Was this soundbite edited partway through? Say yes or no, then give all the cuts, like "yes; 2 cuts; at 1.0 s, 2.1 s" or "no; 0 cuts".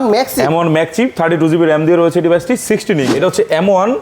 yes; 1 cut; at 3.1 s